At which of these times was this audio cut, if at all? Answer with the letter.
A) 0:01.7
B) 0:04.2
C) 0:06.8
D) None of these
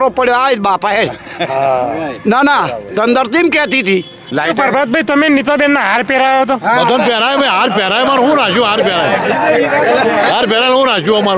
B